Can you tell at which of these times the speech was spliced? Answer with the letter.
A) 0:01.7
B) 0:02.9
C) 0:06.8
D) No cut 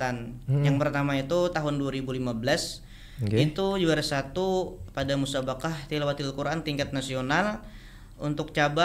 D